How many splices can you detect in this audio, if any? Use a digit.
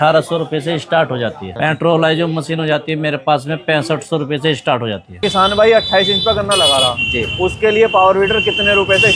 2